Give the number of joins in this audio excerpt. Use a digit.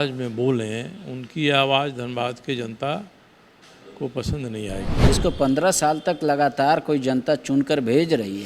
1